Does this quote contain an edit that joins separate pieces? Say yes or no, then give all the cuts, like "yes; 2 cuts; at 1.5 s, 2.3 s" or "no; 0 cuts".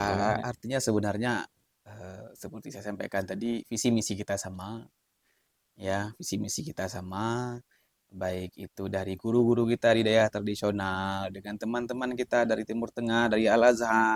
no; 0 cuts